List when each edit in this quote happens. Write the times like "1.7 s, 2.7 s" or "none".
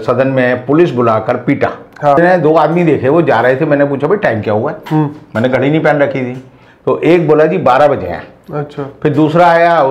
2.2 s